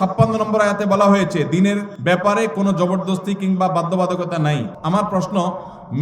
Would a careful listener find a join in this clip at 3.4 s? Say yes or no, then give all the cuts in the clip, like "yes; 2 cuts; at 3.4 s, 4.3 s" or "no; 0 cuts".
no; 2 cuts; at 1.9 s, 4.7 s